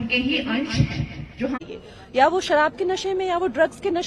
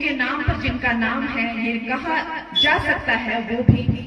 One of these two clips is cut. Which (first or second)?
first